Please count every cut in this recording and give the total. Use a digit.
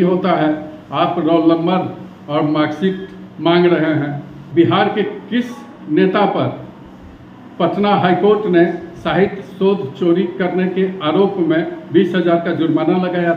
1